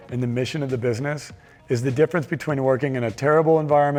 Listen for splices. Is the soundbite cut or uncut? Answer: uncut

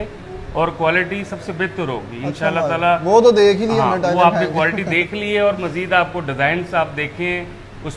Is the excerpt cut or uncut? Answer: uncut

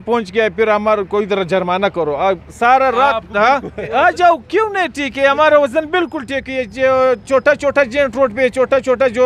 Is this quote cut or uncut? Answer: uncut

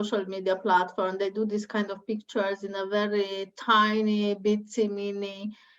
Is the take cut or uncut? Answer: uncut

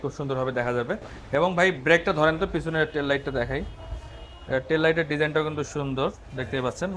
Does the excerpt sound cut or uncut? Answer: uncut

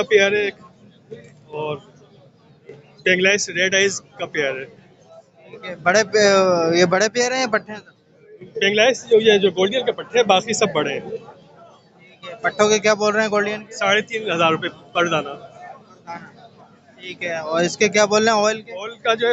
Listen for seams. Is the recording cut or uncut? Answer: uncut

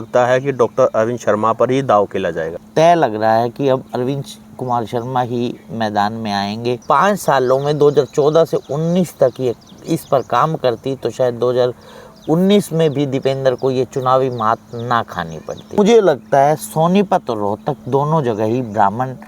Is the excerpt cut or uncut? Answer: cut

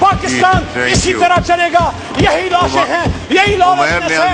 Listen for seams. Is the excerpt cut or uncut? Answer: uncut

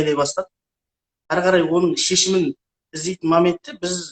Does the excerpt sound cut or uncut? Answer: cut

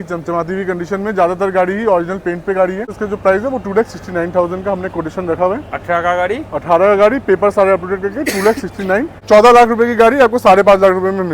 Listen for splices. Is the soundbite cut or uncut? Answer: cut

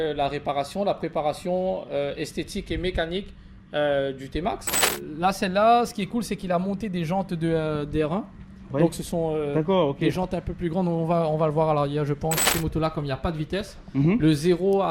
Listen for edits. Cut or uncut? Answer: cut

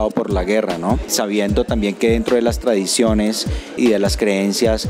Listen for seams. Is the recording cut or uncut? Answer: cut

